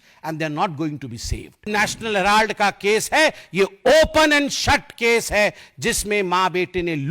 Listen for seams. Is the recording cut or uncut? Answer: cut